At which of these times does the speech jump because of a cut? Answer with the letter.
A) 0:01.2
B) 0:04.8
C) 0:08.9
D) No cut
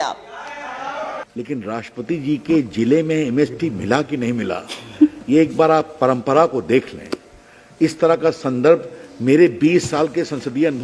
A